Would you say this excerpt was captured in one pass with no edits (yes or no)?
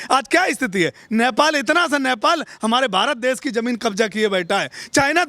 yes